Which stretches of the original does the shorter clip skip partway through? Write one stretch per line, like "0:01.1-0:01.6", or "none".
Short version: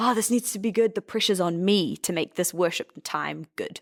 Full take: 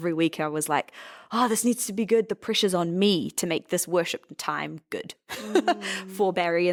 none